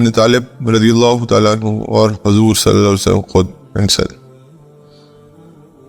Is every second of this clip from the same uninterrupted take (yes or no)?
no